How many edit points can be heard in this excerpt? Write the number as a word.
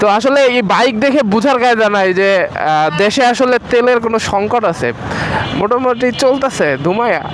zero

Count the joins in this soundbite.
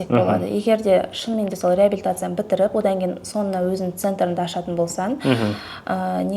zero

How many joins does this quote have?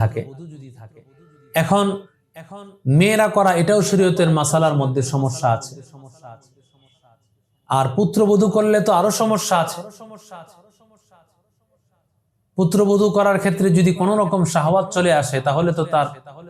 zero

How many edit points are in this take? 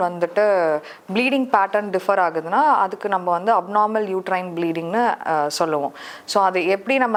zero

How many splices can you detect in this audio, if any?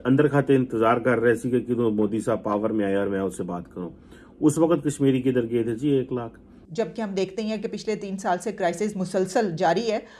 one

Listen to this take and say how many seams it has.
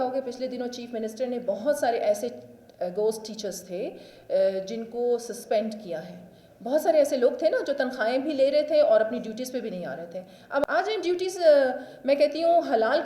one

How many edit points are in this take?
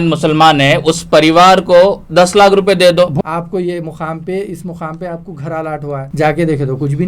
two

